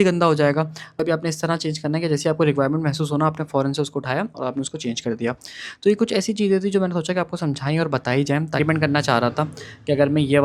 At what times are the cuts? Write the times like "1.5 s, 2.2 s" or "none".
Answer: 1.0 s, 8.6 s